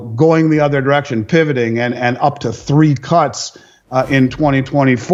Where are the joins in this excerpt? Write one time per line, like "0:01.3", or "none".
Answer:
none